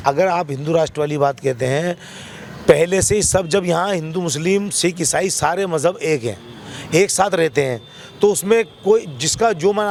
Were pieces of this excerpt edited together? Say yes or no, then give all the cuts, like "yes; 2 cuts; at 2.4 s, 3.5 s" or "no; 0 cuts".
no; 0 cuts